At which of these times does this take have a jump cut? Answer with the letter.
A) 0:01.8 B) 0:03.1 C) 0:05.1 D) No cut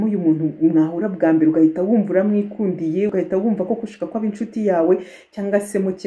B